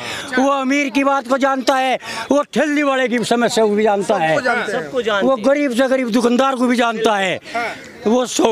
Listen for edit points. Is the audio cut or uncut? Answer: uncut